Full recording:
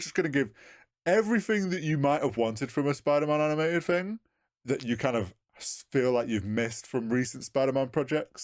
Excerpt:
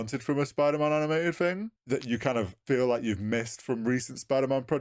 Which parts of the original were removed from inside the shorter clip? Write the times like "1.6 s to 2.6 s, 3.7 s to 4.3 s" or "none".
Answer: 4.2 s to 4.5 s, 5.3 s to 5.8 s